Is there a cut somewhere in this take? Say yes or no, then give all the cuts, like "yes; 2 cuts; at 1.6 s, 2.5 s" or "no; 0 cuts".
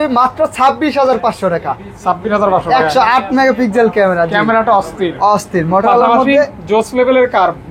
no; 0 cuts